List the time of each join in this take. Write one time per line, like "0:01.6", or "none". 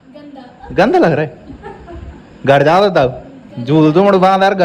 none